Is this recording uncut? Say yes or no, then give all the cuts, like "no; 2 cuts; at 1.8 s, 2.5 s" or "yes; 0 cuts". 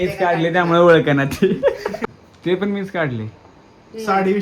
no; 1 cut; at 2.2 s